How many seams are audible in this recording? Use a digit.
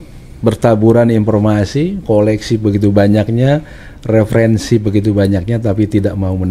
0